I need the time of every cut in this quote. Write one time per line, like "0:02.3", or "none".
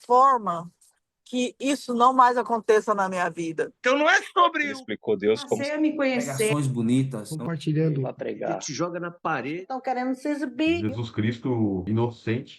0:03.7